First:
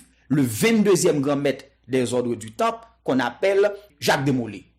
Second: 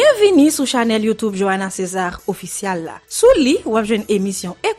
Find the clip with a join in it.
first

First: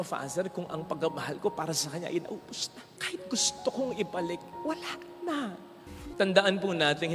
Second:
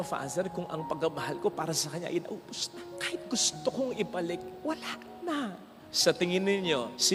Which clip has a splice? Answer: first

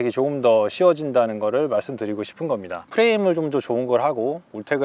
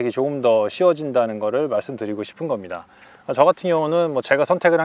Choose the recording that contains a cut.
first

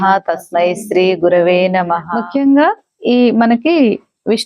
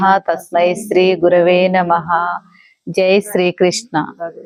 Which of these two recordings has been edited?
first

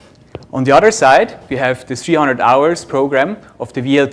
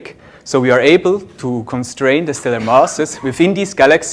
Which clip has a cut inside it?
second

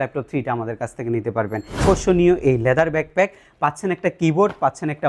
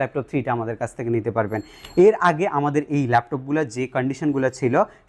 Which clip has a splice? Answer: first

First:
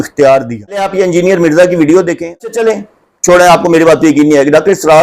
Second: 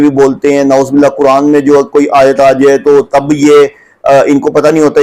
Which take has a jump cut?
first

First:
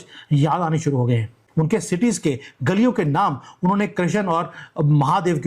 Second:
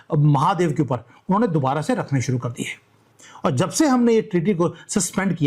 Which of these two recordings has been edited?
second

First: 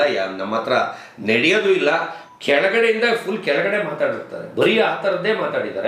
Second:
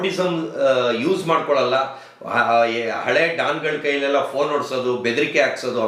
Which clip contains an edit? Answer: first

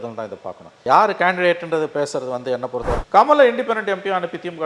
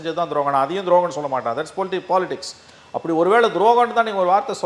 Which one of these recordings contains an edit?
first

